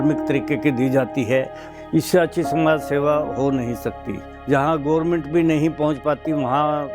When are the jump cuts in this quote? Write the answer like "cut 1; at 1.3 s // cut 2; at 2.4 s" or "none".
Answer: cut 1; at 1.6 s // cut 2; at 4.2 s